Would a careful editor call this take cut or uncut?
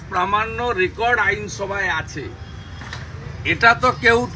uncut